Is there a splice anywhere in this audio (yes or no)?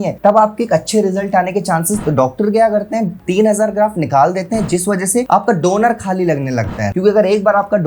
yes